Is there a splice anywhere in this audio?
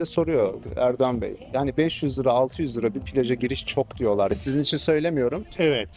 no; 0 cuts

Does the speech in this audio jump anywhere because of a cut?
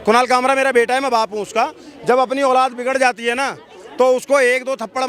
no; 0 cuts

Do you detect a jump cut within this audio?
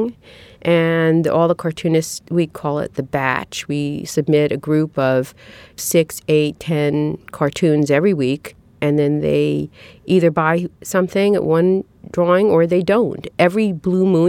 yes; 1 cut; at 8.7 s

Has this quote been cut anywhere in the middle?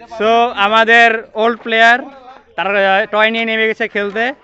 no; 0 cuts

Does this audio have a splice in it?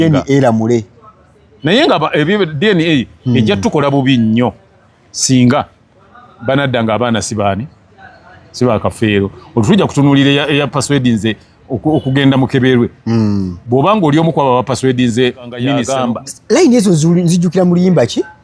yes; 1 cut; at 15.8 s

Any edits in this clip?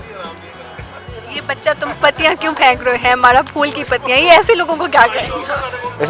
no; 0 cuts

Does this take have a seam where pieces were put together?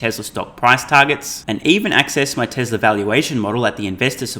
no; 0 cuts

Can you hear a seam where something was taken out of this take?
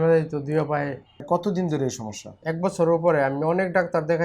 yes; 1 cut; at 1.2 s

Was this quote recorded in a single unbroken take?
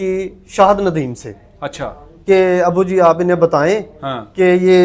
yes; 0 cuts

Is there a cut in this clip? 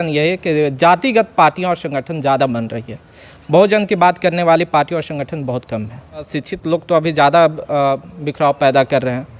yes; 1 cut; at 6.4 s

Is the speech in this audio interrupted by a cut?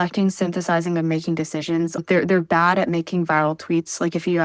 yes; 1 cut; at 2.0 s

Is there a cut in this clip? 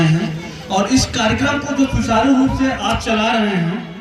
no; 0 cuts

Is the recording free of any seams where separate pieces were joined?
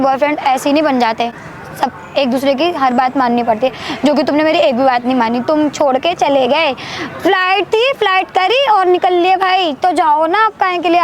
yes; 0 cuts

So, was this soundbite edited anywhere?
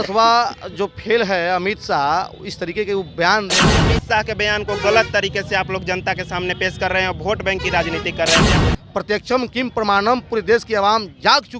yes; 2 cuts; at 3.7 s, 8.5 s

